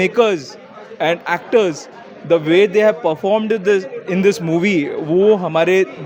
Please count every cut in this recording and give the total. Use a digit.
0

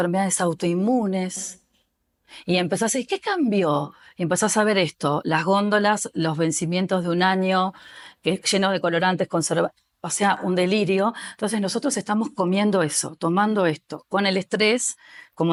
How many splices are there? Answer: 0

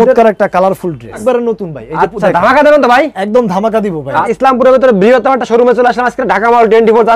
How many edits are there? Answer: 2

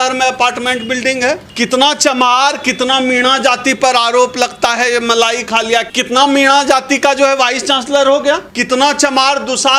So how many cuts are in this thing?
3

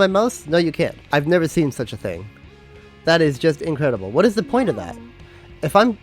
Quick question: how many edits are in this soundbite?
1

